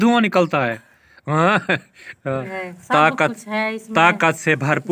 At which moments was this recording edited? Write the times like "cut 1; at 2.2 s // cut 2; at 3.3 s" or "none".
cut 1; at 2.5 s